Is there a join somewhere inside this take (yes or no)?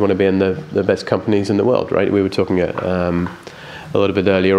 no